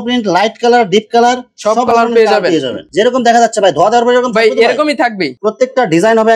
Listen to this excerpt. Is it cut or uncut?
cut